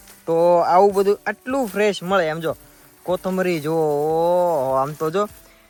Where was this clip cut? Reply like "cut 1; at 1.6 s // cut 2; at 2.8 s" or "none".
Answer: none